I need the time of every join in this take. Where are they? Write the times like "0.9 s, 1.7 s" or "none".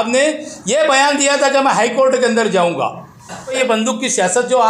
3.6 s